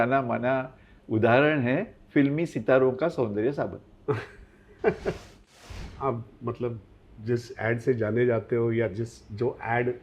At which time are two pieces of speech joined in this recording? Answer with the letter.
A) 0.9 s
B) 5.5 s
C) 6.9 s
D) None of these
B